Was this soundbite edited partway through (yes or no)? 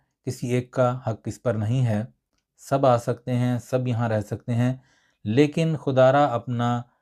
no